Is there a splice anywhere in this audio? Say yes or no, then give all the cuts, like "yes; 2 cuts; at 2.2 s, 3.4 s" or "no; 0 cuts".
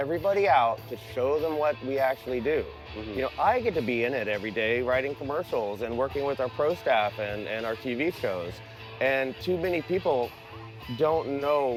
no; 0 cuts